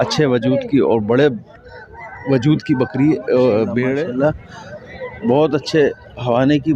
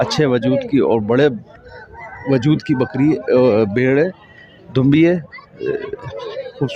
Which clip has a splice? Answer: first; 1 cut; at 4.1 s

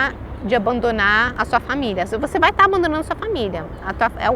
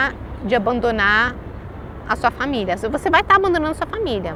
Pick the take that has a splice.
first; 1 cut; at 1.3 s

